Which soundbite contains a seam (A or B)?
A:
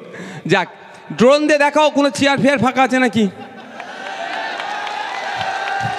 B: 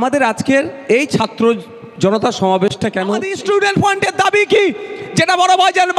B